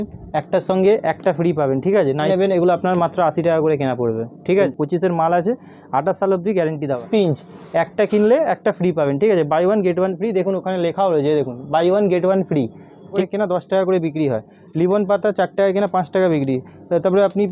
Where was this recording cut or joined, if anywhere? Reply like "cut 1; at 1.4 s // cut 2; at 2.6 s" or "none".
cut 1; at 2.3 s // cut 2; at 4.7 s // cut 3; at 7.0 s // cut 4; at 13.2 s

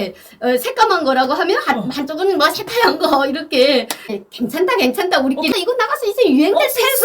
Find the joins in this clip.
cut 1; at 4.1 s // cut 2; at 5.5 s

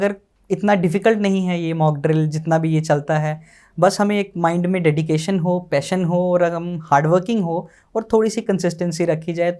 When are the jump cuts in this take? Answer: none

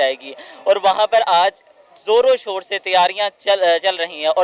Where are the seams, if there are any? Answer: none

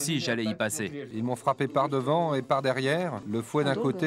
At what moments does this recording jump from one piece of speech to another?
cut 1; at 1.0 s // cut 2; at 3.2 s

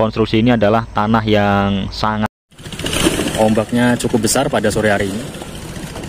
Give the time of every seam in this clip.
cut 1; at 2.4 s

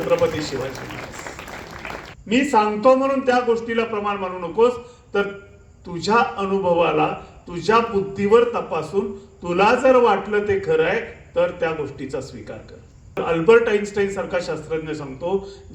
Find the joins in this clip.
cut 1; at 2.1 s // cut 2; at 13.2 s

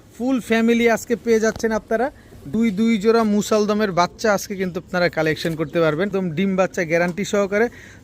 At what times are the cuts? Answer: cut 1; at 2.5 s // cut 2; at 6.1 s

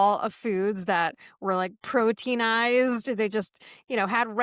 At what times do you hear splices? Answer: none

